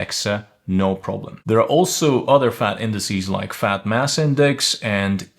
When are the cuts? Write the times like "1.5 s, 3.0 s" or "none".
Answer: 1.4 s